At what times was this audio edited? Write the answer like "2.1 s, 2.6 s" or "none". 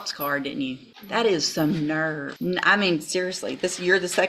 0.9 s, 2.3 s